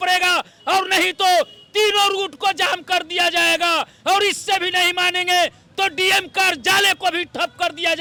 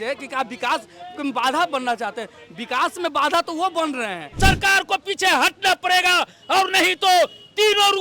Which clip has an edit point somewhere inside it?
second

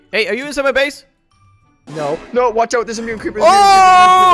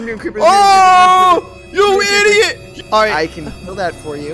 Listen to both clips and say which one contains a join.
second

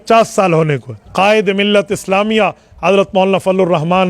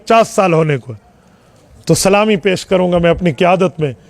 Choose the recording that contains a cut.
first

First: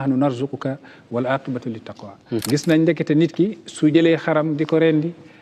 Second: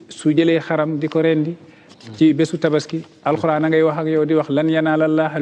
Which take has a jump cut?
first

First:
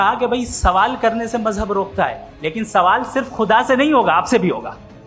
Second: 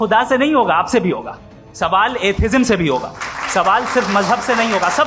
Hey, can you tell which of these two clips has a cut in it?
first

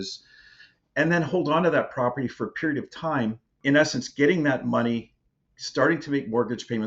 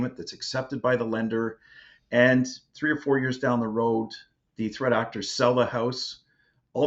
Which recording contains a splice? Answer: first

